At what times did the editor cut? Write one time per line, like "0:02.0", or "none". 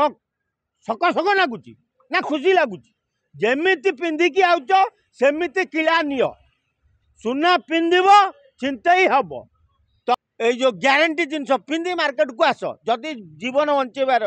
0:10.2